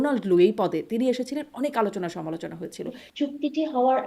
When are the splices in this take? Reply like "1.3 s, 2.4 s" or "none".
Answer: 3.0 s